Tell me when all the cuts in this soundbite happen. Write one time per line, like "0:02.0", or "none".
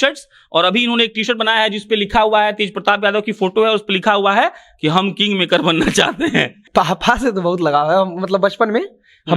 0:06.6